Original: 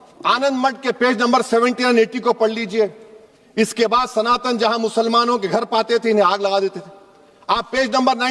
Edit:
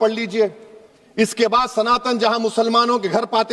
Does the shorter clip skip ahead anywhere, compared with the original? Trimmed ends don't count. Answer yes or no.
no